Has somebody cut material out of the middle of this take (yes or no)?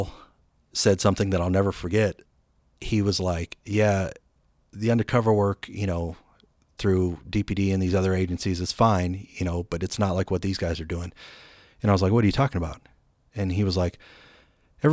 yes